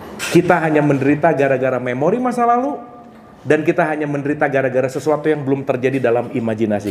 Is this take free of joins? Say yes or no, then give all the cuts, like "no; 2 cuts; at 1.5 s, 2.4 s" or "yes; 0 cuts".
yes; 0 cuts